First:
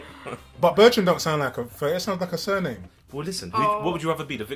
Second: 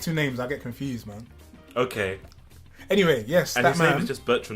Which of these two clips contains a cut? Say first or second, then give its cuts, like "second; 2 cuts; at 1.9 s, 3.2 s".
second; 1 cut; at 3.5 s